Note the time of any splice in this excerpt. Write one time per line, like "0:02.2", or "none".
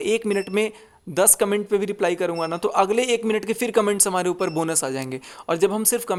none